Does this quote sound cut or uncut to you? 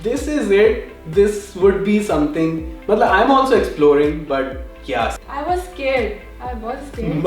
cut